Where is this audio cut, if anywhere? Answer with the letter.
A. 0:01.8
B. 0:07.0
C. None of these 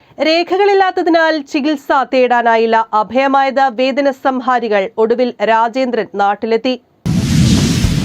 B